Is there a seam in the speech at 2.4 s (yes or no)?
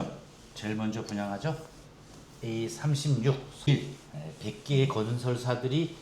no